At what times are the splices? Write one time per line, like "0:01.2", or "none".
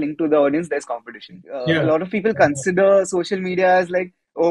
0:01.5